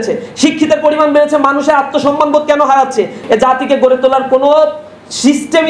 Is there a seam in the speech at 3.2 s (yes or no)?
yes